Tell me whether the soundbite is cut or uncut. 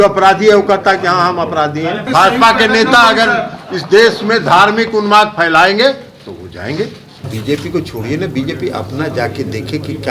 cut